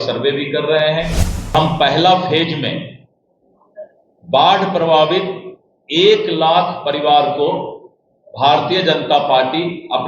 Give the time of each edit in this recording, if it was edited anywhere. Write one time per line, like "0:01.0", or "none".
0:01.5